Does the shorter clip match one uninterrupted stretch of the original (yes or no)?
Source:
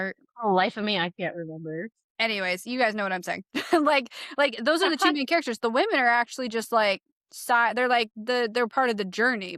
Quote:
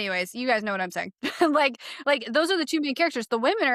yes